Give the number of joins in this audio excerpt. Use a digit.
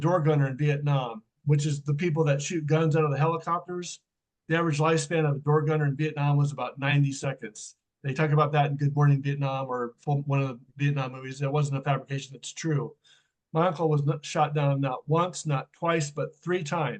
1